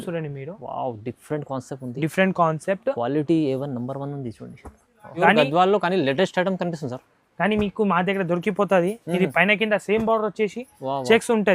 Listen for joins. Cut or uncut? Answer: cut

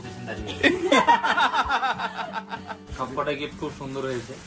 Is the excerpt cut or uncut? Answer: cut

